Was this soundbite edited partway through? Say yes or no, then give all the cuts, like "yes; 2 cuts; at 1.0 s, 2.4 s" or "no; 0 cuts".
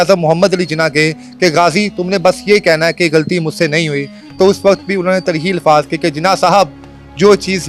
no; 0 cuts